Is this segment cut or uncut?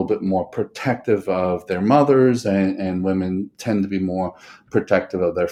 uncut